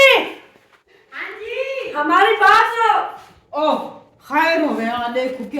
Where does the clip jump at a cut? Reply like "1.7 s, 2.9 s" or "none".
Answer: 3.0 s